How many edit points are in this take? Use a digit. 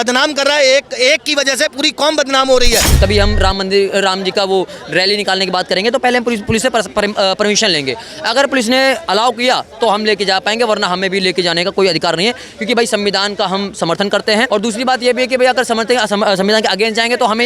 2